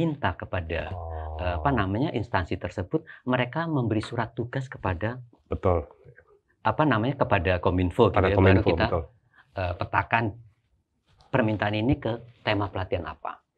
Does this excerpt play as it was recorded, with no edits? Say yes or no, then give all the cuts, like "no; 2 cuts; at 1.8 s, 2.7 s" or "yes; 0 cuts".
yes; 0 cuts